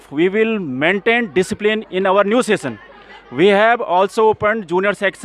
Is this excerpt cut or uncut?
uncut